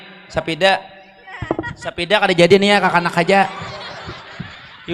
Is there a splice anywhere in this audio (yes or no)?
no